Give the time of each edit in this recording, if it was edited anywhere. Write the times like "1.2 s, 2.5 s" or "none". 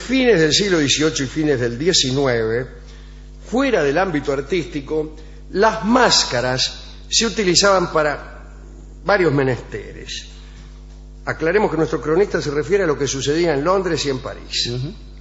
14.2 s